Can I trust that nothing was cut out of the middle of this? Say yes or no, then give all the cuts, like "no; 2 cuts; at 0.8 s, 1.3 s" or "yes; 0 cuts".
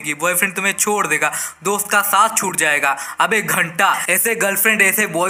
yes; 0 cuts